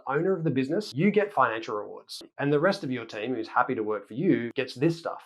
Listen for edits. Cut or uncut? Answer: cut